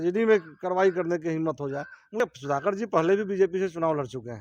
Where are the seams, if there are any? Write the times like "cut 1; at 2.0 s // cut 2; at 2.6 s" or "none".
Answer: cut 1; at 2.2 s

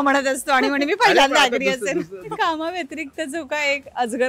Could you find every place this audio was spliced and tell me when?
cut 1; at 2.3 s

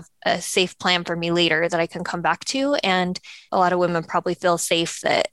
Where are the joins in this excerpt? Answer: cut 1; at 3.3 s

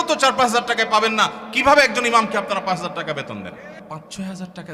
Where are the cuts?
cut 1; at 3.8 s

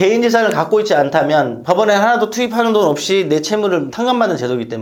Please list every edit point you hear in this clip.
none

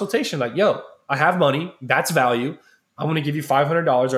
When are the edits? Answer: none

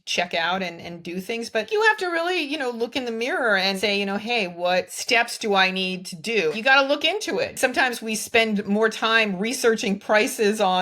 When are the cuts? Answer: cut 1; at 1.7 s // cut 2; at 3.8 s // cut 3; at 5.0 s // cut 4; at 6.5 s // cut 5; at 7.5 s

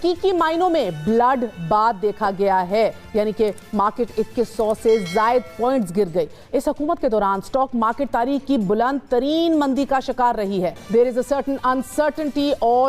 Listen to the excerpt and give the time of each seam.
none

